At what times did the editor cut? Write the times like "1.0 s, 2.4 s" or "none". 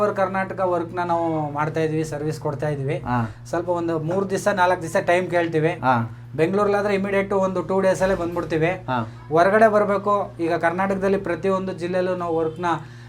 none